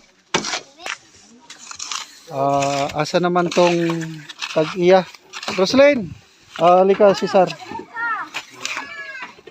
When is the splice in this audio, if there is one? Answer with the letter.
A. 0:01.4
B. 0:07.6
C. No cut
C